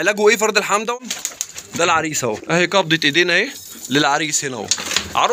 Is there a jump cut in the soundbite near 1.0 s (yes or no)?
yes